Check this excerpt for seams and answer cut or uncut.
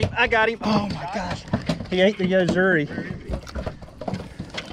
uncut